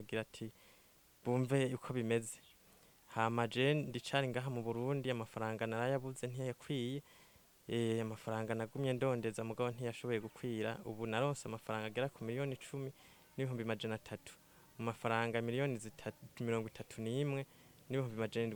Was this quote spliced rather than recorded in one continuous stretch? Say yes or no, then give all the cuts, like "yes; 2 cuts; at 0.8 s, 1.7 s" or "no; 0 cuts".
no; 0 cuts